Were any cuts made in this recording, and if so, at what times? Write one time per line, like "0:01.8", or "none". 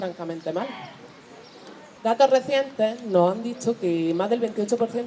0:03.3